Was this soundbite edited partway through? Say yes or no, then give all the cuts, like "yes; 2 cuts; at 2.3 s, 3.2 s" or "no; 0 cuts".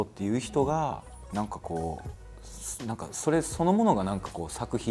no; 0 cuts